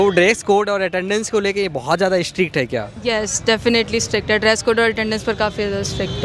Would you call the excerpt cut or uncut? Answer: uncut